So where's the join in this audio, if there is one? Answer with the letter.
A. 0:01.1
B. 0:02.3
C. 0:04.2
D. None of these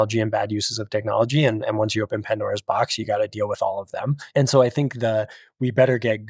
C